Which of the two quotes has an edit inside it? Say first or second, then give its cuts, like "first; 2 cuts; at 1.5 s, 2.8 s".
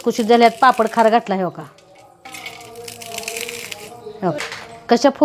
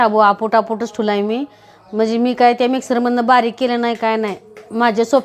first; 2 cuts; at 2.2 s, 4.4 s